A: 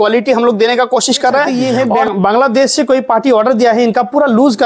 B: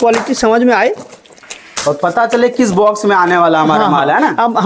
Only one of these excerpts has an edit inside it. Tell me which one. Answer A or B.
A